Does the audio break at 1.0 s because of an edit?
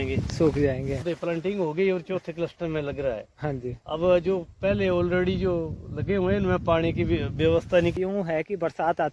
yes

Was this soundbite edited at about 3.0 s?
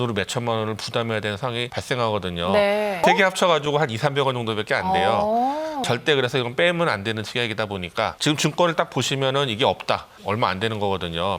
yes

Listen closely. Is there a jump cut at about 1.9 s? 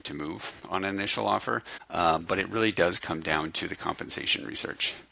yes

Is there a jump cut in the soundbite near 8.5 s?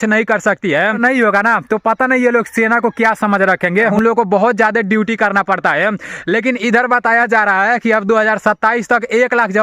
no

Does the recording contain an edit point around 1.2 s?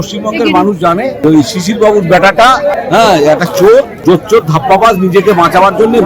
yes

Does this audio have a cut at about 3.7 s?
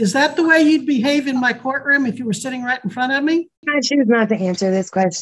yes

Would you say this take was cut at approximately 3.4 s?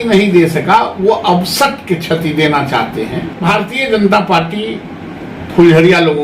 yes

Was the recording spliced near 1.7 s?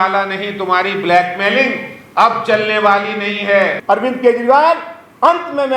no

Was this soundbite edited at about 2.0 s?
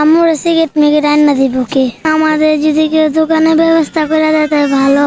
yes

